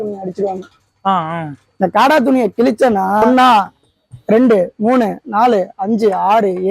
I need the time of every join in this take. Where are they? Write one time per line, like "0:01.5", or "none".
0:03.3

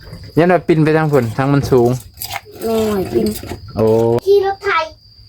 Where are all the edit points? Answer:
0:04.2

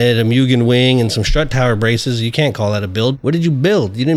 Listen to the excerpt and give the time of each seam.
0:03.2

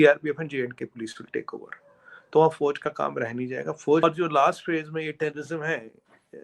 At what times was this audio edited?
0:04.0

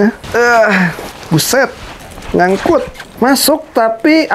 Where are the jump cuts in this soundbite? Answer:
0:01.1
0:03.0

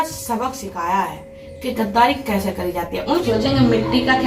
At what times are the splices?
0:03.2

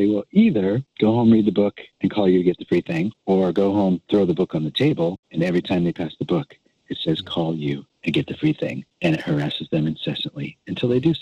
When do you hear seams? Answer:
0:00.9
0:01.8
0:03.2
0:05.2
0:07.9
0:08.8

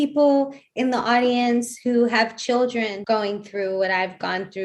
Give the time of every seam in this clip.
0:03.0

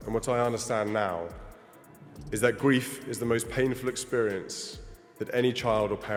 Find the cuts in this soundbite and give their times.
none

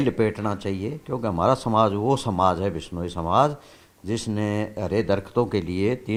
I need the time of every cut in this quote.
none

